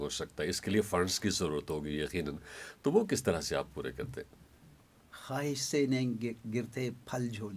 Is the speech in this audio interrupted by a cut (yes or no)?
no